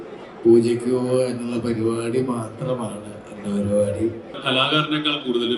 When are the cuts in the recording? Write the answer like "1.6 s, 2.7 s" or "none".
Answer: 4.4 s